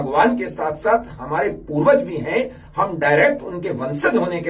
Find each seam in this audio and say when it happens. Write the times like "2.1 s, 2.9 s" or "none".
none